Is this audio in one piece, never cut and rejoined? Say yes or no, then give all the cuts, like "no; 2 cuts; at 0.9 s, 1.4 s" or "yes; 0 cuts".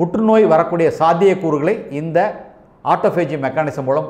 yes; 0 cuts